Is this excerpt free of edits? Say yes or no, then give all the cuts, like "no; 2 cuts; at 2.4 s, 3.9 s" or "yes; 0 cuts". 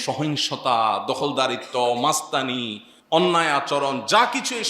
yes; 0 cuts